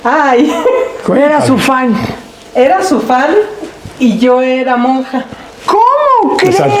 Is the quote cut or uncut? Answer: uncut